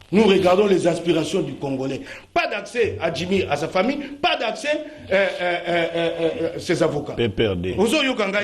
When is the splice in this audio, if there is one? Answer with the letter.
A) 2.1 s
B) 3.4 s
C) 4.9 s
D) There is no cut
A